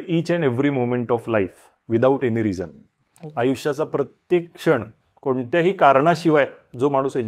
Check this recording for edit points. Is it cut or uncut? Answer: uncut